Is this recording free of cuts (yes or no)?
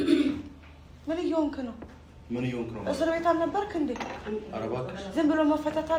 yes